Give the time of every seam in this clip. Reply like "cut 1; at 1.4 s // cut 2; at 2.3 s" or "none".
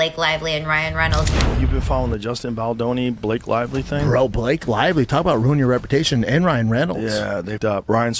cut 1; at 1.4 s